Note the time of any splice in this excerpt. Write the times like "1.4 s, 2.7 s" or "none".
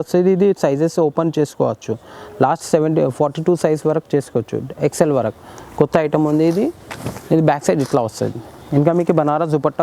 none